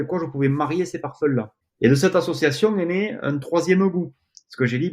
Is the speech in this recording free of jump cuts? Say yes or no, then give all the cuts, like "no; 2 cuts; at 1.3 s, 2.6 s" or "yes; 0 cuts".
no; 1 cut; at 1.6 s